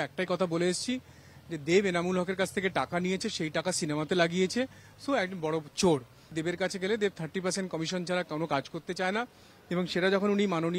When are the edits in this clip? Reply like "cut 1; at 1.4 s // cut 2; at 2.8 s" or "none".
cut 1; at 6.4 s